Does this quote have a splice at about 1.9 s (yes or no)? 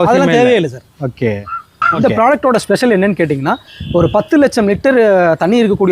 yes